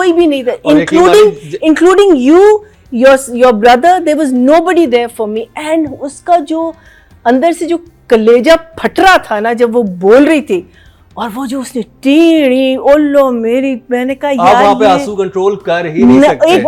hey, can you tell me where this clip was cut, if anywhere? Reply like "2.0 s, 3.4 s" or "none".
none